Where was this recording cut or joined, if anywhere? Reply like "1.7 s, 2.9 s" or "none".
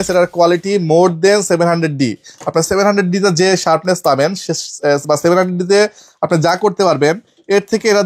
none